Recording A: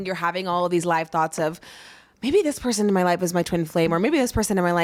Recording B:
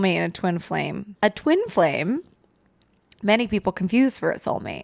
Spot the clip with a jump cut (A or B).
B